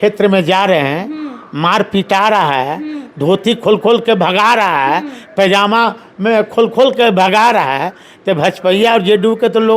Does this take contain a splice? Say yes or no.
no